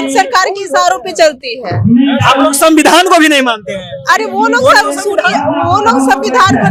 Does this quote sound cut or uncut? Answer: uncut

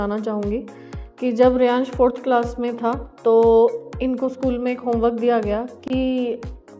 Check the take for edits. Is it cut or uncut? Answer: uncut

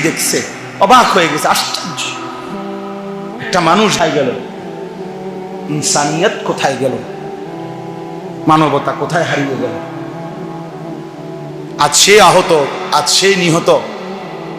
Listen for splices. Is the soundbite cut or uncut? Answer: uncut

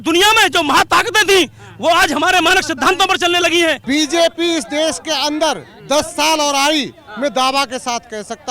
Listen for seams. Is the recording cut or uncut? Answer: cut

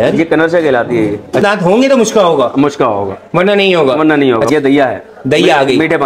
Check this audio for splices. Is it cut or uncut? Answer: cut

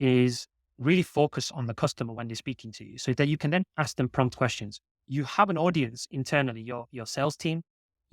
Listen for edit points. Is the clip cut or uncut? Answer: cut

